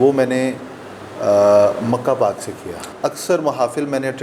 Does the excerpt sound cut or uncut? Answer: cut